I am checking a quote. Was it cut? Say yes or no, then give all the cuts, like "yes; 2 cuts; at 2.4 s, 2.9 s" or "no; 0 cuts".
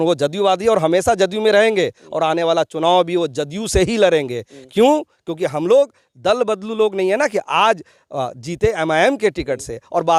no; 0 cuts